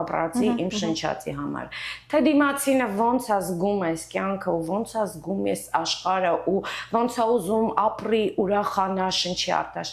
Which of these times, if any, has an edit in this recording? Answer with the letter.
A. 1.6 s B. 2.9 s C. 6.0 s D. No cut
D